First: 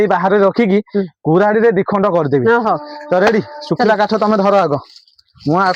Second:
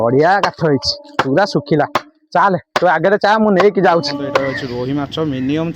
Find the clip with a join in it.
second; 1 cut; at 4.4 s

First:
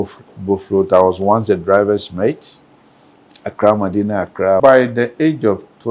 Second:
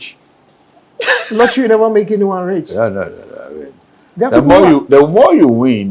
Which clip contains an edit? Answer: first; 1 cut; at 4.6 s

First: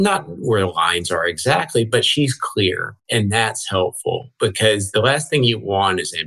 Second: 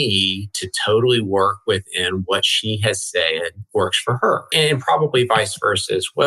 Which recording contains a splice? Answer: first; 1 cut; at 2.9 s

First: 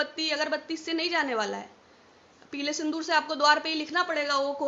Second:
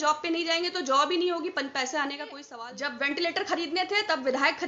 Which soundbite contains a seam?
second; 1 cut; at 2.5 s

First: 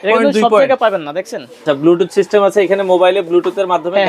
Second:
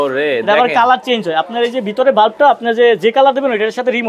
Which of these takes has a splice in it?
first; 1 cut; at 1.6 s

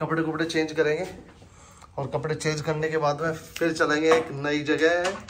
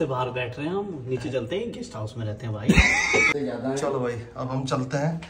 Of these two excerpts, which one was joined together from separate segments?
second; 1 cut; at 3.3 s

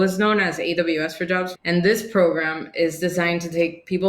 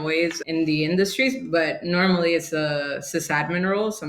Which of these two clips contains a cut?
first; 1 cut; at 1.5 s

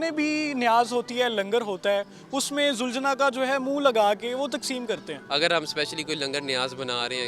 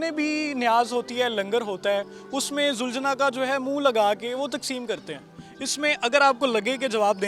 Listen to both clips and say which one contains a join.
first; 1 cut; at 5.1 s

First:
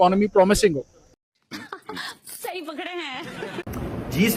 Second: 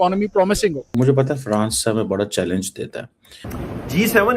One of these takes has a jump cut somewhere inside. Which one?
second; 2 cuts; at 0.8 s, 3.4 s

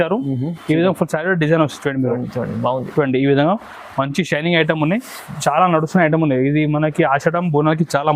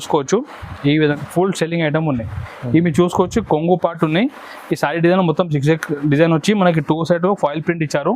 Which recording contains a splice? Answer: second; 1 cut; at 1.2 s

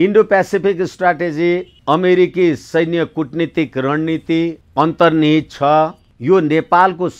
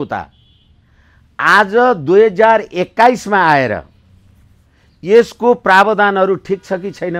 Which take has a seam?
first; 3 cuts; at 1.7 s, 4.6 s, 6.1 s

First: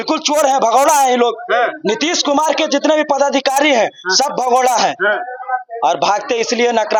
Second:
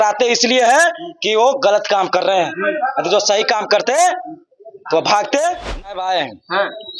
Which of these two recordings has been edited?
second; 1 cut; at 5.9 s

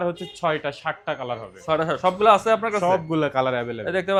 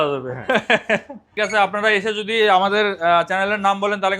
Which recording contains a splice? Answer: second; 1 cut; at 1.2 s

